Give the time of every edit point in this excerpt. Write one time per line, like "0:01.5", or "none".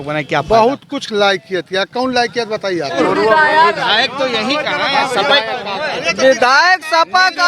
0:02.9